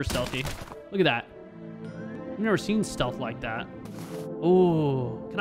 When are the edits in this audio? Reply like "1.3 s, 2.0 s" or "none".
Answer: 2.2 s